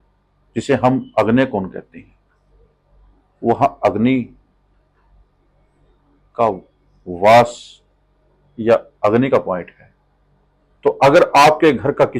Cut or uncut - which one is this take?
uncut